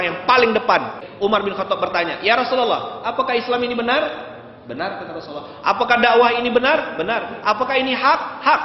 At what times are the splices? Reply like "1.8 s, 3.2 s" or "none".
1.0 s